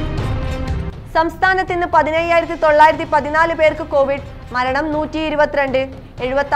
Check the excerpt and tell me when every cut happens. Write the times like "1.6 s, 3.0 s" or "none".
1.0 s